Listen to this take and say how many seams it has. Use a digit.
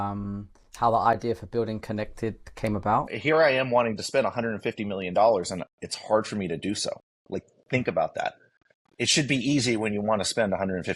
1